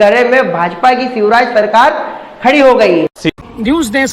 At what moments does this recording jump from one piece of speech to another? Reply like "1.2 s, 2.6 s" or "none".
3.2 s